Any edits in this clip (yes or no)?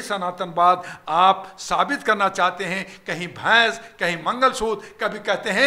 no